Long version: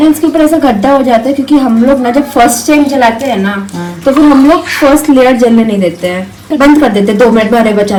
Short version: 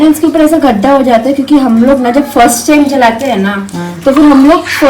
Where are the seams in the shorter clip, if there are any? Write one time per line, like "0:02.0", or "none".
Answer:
none